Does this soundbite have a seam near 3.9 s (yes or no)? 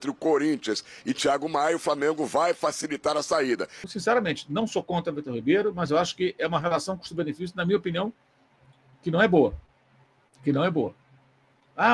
yes